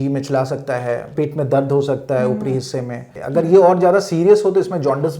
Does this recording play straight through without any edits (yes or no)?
no